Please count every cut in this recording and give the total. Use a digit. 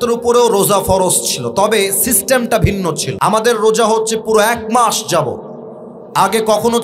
1